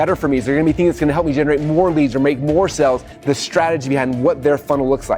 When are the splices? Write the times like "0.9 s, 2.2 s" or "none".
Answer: 3.1 s